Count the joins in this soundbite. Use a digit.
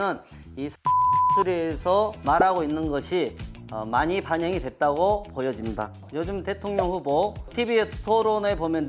1